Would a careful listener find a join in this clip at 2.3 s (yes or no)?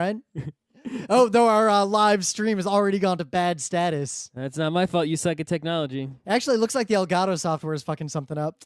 yes